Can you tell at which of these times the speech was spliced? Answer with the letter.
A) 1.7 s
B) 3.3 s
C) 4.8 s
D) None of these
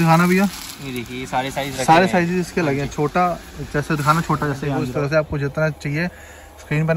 C